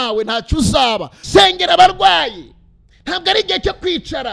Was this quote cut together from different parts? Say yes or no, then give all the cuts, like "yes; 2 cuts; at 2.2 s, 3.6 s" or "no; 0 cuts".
yes; 1 cut; at 1.1 s